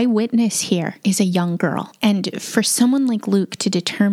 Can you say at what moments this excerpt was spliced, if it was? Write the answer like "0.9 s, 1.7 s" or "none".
0.9 s

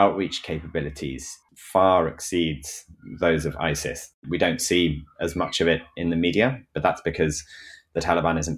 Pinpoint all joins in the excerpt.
1.5 s, 4.2 s

